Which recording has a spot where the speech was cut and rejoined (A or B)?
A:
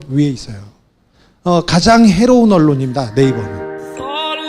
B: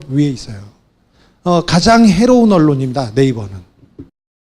A